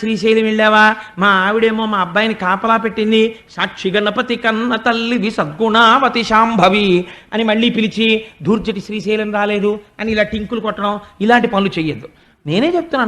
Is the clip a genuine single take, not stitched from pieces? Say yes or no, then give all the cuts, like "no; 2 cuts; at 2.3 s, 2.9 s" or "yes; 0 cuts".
yes; 0 cuts